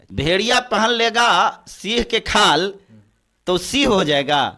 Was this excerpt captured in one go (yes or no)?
yes